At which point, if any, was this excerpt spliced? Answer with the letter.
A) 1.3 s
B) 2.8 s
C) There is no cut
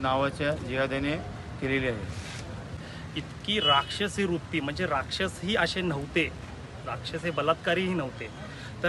B